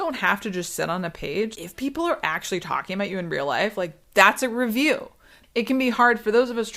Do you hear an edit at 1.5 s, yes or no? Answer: yes